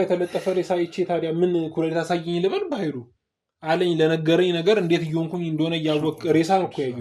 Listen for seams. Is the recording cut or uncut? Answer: uncut